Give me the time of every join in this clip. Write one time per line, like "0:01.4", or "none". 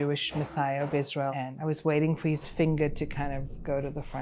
0:01.4